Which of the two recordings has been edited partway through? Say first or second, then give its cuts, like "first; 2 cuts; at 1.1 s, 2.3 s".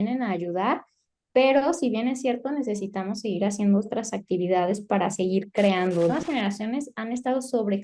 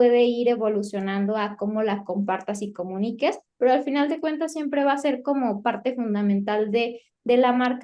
first; 1 cut; at 6.1 s